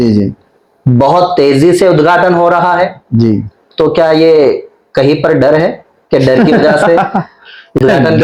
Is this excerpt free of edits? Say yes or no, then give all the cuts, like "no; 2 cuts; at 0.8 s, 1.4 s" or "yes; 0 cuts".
yes; 0 cuts